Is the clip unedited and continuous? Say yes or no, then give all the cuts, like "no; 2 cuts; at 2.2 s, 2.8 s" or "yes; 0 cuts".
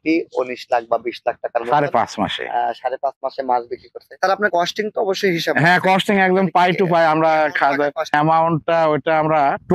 yes; 0 cuts